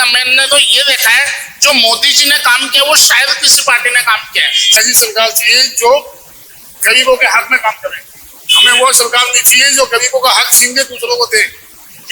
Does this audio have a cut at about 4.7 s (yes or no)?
yes